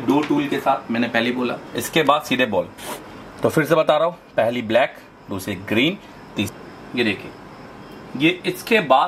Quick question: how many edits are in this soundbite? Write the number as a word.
two